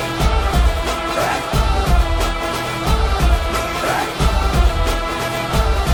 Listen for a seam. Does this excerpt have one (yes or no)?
no